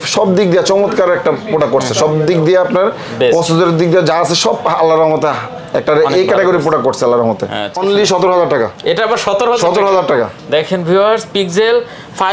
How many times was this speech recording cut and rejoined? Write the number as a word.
one